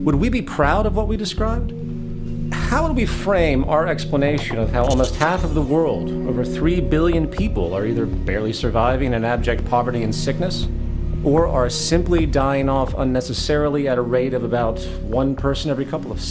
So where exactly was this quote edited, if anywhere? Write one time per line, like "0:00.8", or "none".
0:01.8